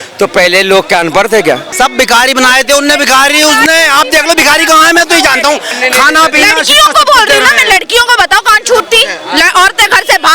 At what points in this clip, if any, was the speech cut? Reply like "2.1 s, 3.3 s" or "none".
1.7 s, 5.7 s